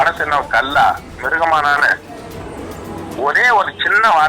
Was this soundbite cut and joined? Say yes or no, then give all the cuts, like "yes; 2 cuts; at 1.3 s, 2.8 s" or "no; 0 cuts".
yes; 1 cut; at 2.3 s